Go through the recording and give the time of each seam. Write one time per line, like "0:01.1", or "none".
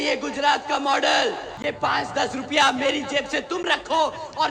0:01.5